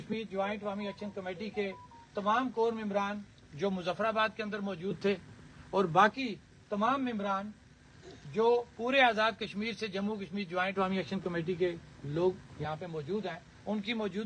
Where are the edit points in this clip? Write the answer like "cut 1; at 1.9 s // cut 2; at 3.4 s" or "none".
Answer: none